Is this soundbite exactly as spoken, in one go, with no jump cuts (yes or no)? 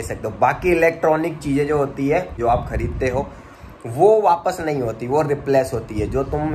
no